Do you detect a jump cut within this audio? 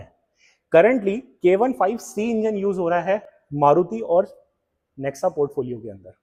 no; 0 cuts

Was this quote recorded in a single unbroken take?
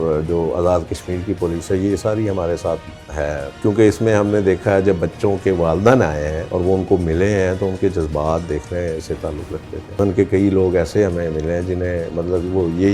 no; 3 cuts; at 3.5 s, 6.4 s, 10.0 s

